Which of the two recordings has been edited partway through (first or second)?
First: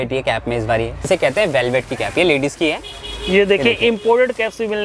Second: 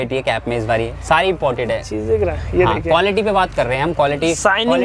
first